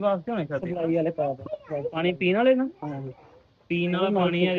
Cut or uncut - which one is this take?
uncut